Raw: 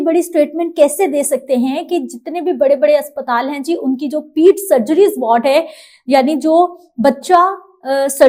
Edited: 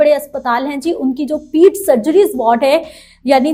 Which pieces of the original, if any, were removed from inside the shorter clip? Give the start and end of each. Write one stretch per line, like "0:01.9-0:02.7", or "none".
none